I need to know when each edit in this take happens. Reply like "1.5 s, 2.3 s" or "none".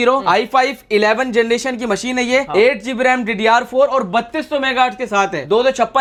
none